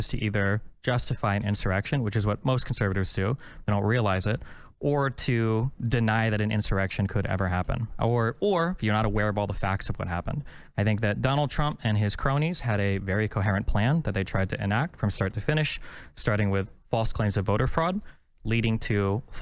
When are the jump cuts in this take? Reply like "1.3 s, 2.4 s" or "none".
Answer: none